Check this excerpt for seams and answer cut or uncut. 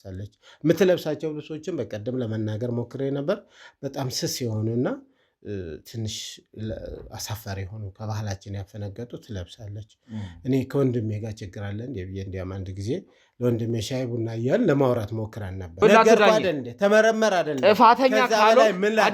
cut